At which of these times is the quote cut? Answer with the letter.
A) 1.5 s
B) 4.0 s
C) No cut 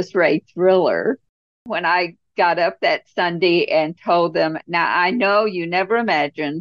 A